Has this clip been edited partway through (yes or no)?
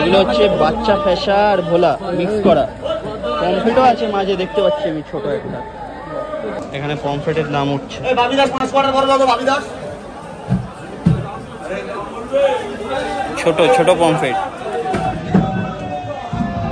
no